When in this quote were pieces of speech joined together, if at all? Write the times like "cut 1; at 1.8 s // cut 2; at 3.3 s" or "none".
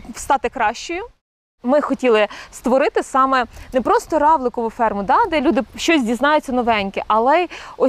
cut 1; at 1.5 s